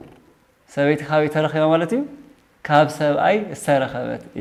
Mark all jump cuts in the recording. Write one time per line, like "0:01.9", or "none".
none